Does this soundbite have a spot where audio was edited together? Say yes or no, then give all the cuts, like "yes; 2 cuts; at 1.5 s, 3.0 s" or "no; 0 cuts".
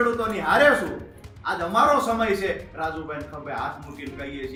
no; 0 cuts